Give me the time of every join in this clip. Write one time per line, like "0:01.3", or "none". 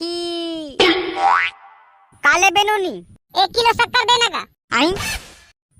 0:01.2

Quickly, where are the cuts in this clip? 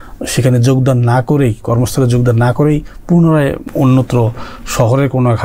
0:03.7

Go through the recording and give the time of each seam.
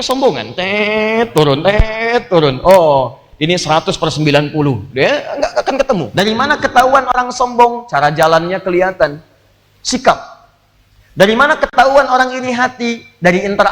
0:06.1

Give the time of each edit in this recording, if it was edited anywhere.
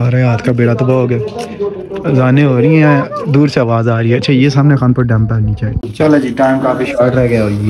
0:05.8

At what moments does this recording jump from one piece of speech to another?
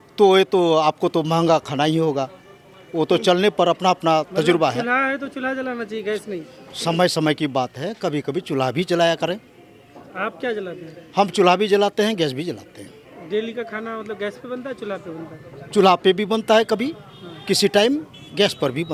none

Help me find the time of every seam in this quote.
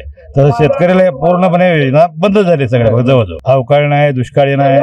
0:03.3

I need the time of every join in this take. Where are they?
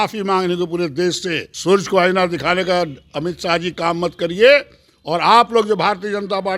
0:01.5

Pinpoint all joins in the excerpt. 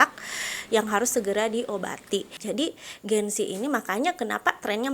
0:02.3

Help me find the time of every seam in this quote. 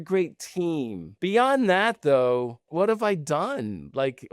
0:01.0
0:02.7

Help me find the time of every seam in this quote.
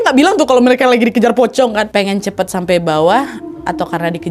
0:01.9

